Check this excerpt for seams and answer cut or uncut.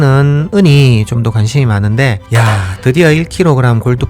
cut